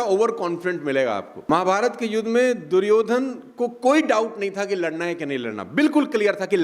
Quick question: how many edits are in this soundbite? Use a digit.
1